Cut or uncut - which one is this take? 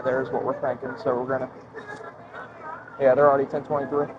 uncut